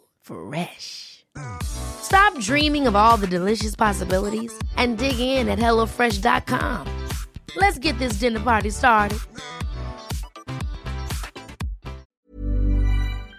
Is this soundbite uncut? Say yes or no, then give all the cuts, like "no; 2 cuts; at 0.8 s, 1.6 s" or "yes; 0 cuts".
no; 1 cut; at 12.2 s